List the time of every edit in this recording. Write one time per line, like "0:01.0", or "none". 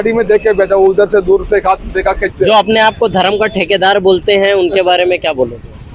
0:02.3